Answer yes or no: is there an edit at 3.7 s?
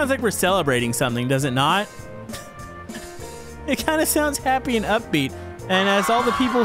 no